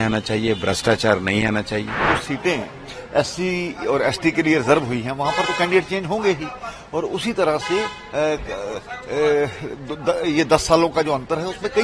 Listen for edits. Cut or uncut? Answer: cut